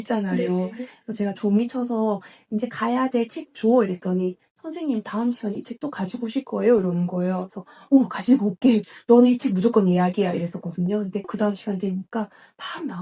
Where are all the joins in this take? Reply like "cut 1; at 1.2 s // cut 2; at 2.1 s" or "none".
none